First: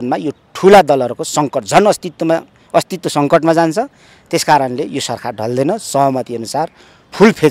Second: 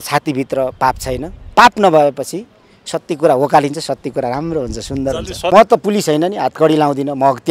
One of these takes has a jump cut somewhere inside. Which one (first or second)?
second